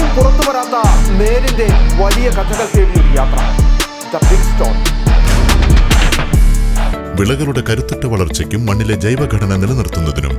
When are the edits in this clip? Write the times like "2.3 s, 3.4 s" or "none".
6.9 s